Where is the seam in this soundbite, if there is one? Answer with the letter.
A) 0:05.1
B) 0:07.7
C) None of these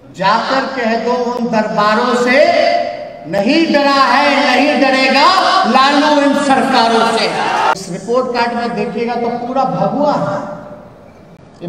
B